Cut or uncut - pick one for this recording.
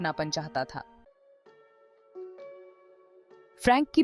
cut